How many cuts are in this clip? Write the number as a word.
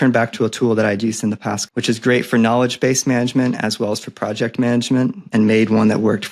two